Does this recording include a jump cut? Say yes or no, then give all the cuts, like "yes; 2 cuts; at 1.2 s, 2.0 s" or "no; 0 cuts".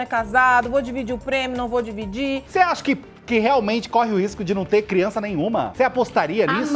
yes; 2 cuts; at 2.4 s, 5.7 s